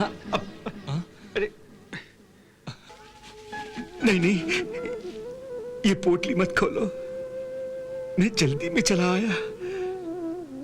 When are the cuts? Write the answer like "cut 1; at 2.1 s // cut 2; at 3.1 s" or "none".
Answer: cut 1; at 3.0 s // cut 2; at 8.0 s